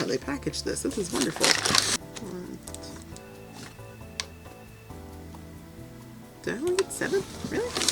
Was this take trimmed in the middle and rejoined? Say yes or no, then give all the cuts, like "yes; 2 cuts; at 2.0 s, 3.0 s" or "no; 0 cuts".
yes; 1 cut; at 1.9 s